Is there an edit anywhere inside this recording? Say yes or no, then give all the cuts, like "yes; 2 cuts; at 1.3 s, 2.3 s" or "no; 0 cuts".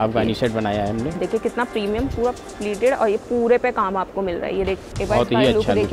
yes; 2 cuts; at 1.2 s, 4.8 s